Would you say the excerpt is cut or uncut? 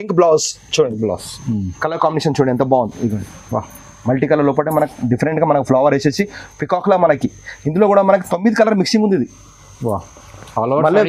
uncut